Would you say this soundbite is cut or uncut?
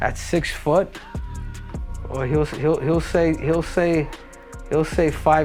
uncut